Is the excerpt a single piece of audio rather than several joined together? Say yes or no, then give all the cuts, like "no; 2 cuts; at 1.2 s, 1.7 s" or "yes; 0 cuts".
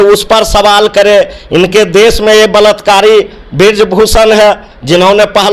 yes; 0 cuts